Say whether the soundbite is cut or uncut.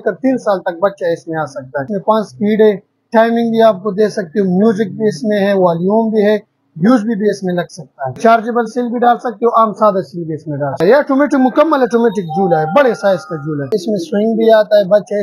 cut